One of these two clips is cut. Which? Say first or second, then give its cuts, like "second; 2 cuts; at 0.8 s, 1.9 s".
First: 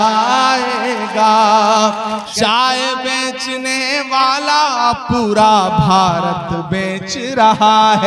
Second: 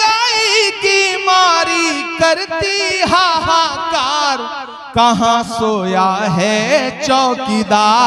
first; 1 cut; at 2.3 s